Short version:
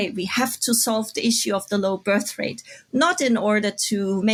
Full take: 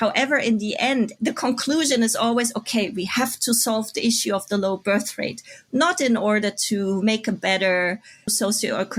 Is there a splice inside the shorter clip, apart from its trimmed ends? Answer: no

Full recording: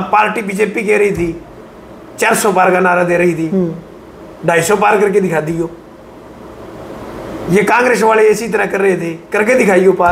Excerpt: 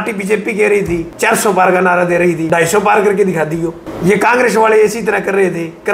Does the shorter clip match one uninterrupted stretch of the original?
no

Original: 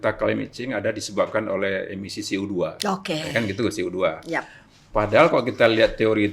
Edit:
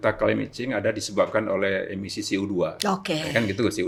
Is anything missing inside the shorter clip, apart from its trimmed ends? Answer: no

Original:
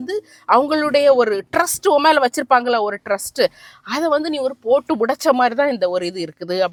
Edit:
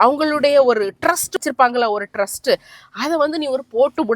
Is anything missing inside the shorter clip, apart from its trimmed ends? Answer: yes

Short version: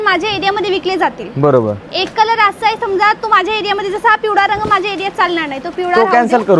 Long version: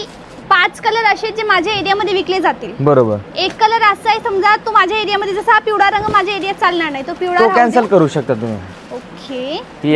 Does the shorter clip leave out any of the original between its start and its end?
no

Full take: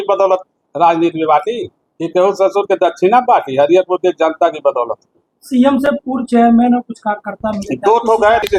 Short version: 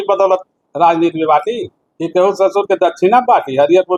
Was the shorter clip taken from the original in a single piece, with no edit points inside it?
yes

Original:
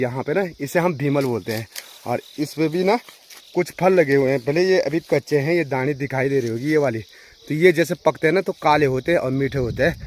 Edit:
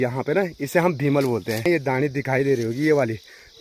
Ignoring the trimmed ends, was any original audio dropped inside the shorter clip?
yes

